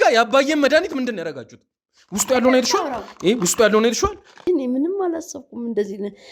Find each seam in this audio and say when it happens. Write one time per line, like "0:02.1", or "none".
0:04.4